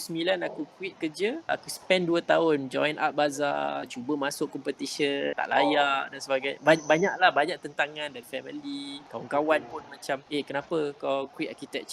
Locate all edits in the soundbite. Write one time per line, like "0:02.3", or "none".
0:01.4
0:03.9
0:05.3
0:08.2
0:09.0
0:10.2